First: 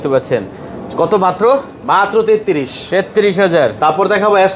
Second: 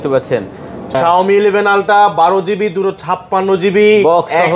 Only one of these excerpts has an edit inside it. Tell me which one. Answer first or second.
second